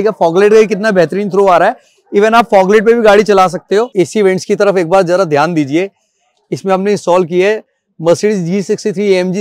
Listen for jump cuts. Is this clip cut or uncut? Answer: cut